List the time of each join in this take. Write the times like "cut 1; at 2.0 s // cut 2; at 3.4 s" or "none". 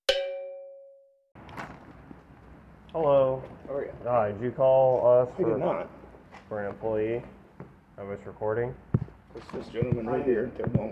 cut 1; at 1.3 s